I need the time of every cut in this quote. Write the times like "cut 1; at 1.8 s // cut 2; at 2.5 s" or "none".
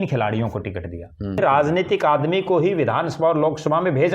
cut 1; at 1.4 s